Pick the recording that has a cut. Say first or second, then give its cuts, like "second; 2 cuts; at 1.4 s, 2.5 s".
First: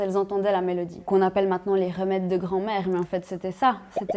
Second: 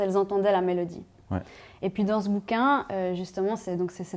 first; 1 cut; at 1.0 s